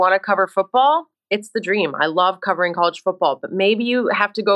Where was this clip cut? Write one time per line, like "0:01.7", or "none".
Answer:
none